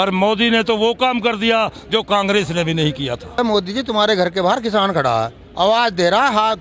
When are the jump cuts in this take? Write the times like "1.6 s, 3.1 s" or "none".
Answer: 3.4 s, 5.4 s